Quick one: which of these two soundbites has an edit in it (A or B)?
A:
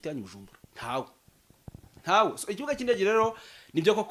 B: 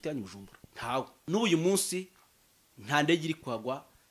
B